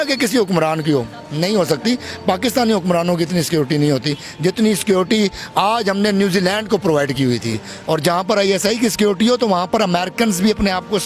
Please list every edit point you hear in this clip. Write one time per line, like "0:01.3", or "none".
0:07.7